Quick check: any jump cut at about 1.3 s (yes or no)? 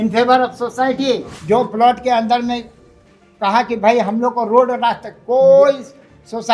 yes